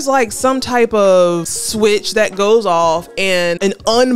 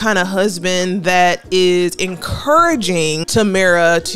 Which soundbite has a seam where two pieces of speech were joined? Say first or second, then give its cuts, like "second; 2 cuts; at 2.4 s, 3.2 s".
second; 1 cut; at 3.2 s